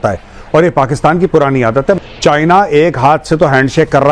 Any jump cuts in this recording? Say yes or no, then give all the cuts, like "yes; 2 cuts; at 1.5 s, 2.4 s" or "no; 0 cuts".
yes; 1 cut; at 2.0 s